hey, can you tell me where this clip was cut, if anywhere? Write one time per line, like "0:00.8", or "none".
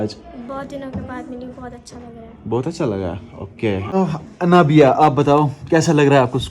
0:03.9